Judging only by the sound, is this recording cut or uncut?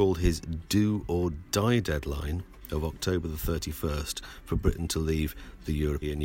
uncut